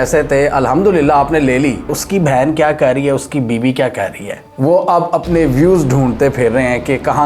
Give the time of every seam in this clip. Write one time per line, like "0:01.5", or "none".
0:01.9
0:04.4